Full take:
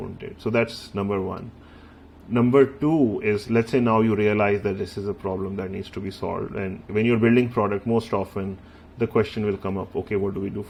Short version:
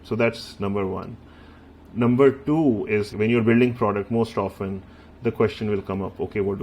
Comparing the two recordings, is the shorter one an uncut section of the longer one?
no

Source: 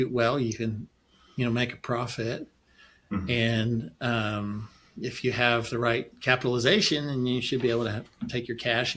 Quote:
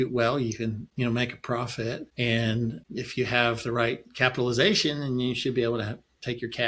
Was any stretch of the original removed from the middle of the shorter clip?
yes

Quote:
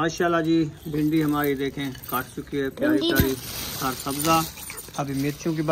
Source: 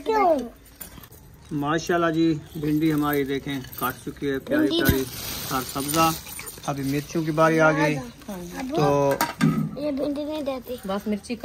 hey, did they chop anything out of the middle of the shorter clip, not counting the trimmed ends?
no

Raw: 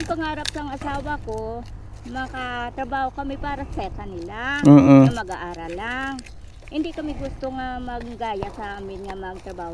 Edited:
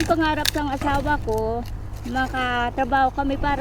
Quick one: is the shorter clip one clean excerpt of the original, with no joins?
yes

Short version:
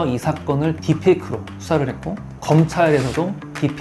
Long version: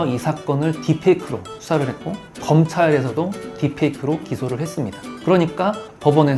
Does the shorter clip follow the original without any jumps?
yes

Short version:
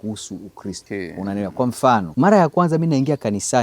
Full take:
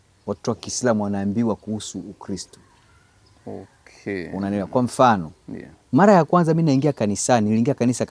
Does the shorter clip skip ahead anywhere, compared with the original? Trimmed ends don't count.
yes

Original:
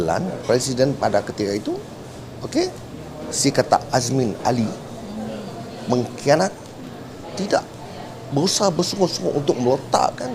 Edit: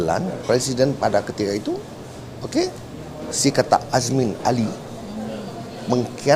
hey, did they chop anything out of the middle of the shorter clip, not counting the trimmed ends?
no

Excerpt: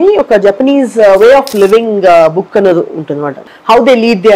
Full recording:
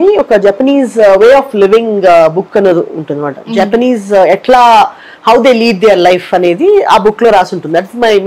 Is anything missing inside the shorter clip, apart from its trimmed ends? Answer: yes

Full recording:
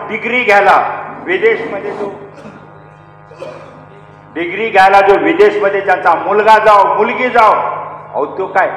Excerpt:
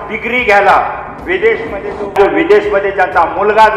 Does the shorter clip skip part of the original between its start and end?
yes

